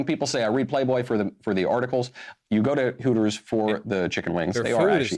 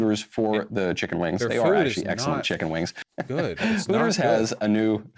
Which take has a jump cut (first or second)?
second